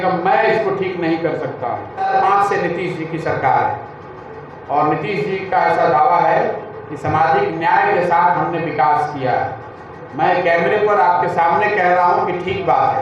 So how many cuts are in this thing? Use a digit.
1